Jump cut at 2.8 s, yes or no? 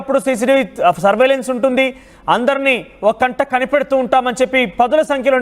yes